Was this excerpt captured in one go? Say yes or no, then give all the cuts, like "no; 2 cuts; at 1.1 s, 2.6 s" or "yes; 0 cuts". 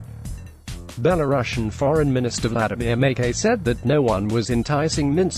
no; 2 cuts; at 1.0 s, 3.8 s